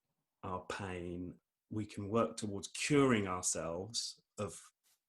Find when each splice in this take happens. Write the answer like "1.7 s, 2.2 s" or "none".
1.4 s